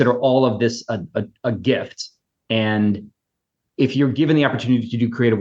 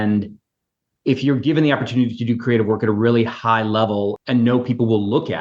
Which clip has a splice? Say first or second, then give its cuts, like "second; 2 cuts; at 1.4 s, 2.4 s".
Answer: second; 1 cut; at 4.2 s